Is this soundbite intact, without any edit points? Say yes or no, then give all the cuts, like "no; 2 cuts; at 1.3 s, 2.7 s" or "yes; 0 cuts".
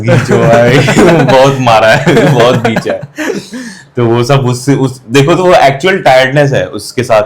yes; 0 cuts